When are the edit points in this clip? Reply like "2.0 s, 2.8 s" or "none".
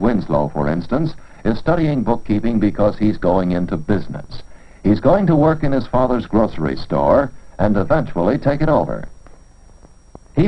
none